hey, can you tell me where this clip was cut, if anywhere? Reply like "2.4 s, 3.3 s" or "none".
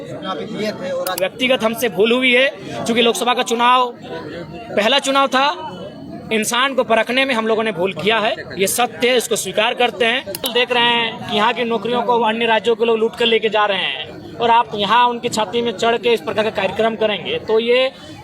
1.2 s, 10.5 s